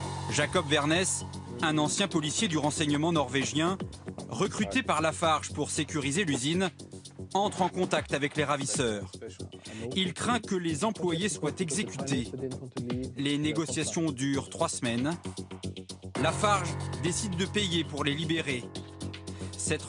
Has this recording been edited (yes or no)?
yes